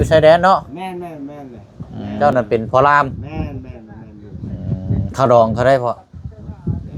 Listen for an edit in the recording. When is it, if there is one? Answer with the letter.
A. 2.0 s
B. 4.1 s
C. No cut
A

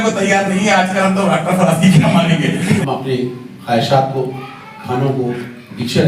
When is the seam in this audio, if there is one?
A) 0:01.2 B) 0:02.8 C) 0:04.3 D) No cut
B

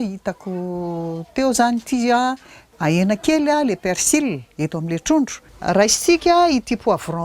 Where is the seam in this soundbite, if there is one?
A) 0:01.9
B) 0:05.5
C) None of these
B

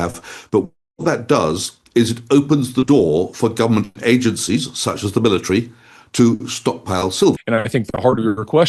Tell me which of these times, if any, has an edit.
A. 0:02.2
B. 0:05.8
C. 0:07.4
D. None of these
C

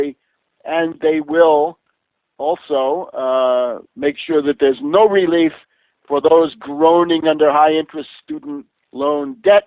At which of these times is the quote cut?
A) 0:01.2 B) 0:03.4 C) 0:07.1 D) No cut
B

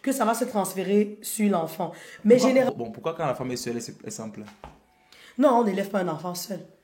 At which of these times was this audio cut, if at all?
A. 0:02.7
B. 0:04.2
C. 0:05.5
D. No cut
A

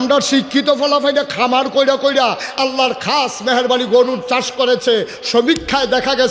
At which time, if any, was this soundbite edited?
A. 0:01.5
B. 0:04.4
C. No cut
C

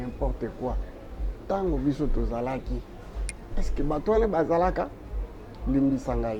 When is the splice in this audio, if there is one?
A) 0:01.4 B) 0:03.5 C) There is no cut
C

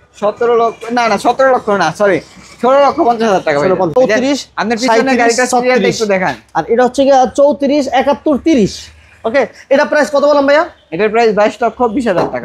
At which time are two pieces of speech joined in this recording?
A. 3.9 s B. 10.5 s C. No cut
A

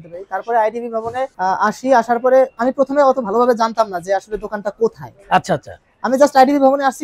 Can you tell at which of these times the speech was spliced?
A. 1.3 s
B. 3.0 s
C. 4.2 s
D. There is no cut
A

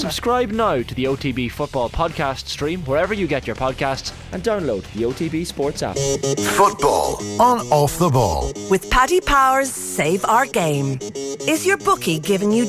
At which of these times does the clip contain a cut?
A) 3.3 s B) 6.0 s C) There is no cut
B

